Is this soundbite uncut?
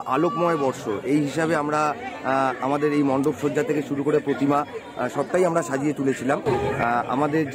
yes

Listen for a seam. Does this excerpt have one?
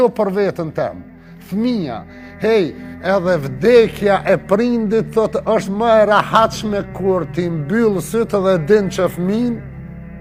no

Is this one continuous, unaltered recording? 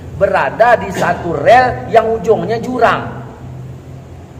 yes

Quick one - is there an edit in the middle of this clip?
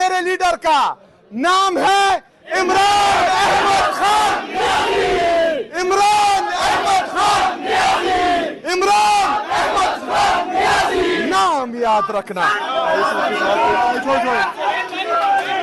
no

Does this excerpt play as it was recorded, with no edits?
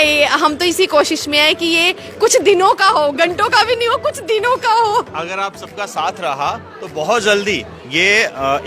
yes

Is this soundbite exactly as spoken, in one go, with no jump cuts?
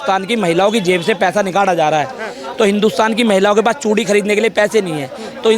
yes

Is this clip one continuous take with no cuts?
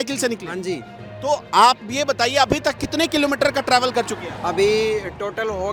yes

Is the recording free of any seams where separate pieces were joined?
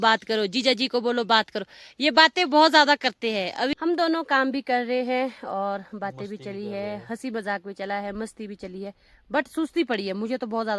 no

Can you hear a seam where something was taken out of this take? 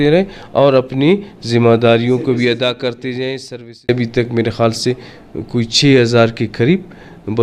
yes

